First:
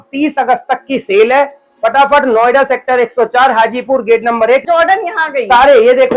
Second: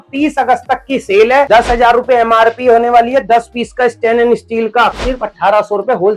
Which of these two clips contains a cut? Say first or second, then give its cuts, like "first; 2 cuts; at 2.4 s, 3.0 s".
second; 2 cuts; at 1.5 s, 4.9 s